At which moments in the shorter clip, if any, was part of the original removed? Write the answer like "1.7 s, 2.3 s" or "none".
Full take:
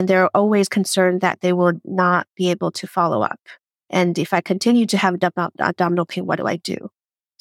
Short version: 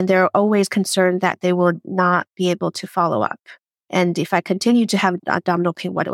5.2 s